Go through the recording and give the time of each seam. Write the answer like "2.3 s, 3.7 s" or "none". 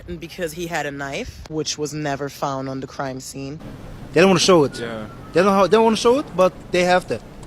3.6 s